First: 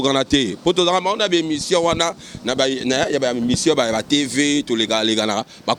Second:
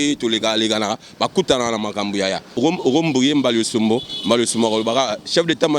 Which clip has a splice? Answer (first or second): second